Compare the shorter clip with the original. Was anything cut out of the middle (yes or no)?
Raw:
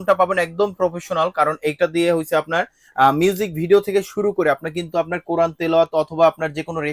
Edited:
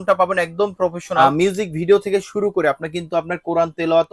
yes